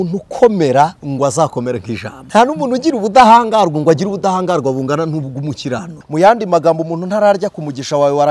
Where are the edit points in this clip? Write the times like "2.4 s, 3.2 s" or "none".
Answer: 1.0 s, 2.2 s, 5.9 s